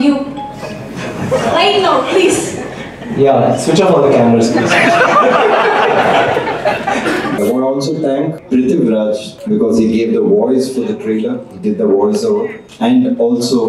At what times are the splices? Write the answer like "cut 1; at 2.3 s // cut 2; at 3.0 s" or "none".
cut 1; at 7.4 s // cut 2; at 8.4 s // cut 3; at 9.3 s // cut 4; at 12.6 s